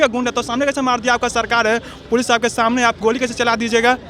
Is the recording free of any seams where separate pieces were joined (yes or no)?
yes